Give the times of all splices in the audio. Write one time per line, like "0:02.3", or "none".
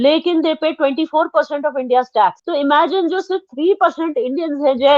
0:02.4

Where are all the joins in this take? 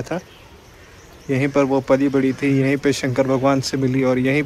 none

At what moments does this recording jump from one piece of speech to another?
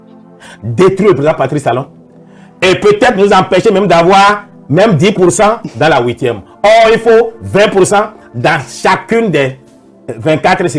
none

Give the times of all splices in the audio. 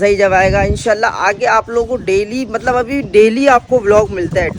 none

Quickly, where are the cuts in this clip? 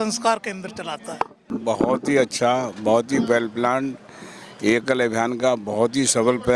0:01.4

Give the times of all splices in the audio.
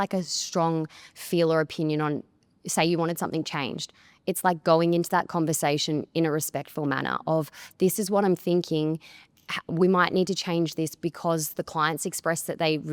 none

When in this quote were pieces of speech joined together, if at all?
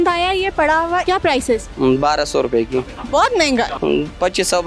0:01.1
0:03.8

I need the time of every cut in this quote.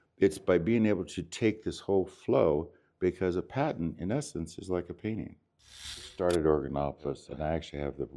0:06.1
0:07.3

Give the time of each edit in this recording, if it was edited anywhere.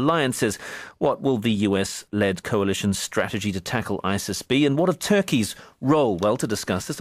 0:05.0

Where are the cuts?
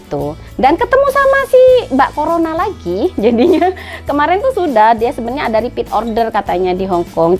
none

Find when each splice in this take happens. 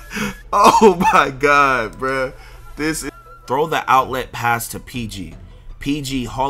0:03.0

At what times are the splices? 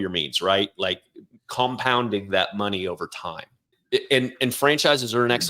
0:03.8

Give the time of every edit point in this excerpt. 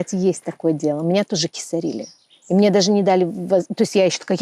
none

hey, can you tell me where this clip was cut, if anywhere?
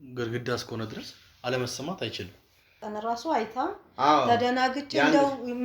0:02.8

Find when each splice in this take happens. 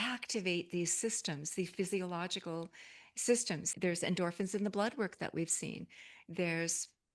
0:03.7

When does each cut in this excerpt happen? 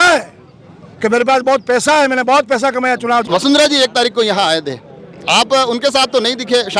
0:03.3

